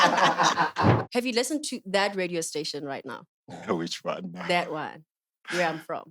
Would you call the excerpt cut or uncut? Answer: cut